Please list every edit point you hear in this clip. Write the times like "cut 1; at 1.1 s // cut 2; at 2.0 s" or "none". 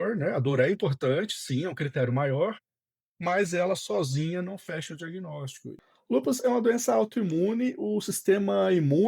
cut 1; at 5.8 s